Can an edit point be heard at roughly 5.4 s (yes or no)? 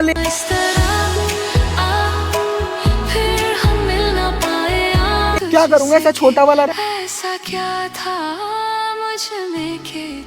yes